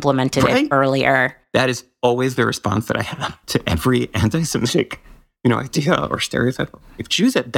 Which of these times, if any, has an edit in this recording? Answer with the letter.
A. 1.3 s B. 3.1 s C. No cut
A